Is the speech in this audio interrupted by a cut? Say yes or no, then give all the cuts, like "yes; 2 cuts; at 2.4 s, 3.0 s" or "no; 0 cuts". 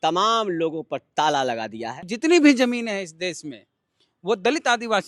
yes; 1 cut; at 2.1 s